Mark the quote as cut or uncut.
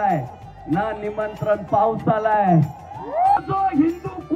cut